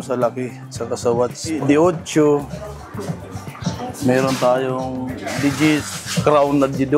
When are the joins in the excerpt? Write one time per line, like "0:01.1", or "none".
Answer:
0:01.5
0:06.0